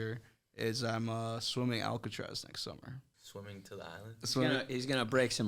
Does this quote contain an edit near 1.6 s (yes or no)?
no